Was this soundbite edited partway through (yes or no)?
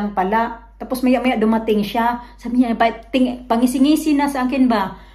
no